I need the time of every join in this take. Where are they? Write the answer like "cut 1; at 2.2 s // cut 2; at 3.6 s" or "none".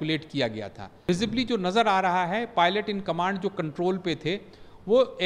cut 1; at 1.0 s

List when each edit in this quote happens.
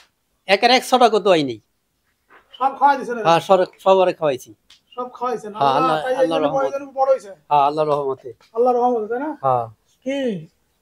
none

